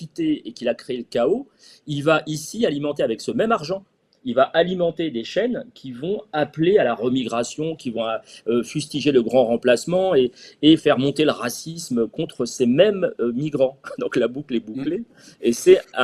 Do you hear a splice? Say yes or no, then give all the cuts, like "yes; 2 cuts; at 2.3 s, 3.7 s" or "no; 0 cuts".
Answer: no; 0 cuts